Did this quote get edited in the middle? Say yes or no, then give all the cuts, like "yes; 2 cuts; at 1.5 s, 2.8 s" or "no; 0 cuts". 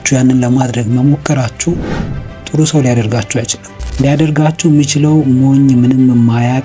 no; 0 cuts